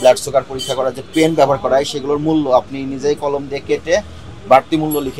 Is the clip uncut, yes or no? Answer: yes